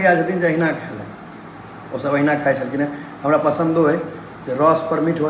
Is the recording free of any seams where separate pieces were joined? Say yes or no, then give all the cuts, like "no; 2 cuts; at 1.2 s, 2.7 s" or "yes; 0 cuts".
yes; 0 cuts